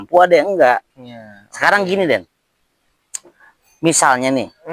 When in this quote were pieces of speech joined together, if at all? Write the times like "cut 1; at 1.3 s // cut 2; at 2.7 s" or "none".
cut 1; at 0.9 s